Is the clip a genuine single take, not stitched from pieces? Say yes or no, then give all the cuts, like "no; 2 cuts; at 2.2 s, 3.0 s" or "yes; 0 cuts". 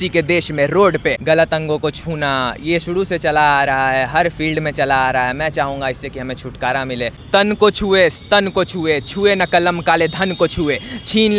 no; 2 cuts; at 1.2 s, 7.2 s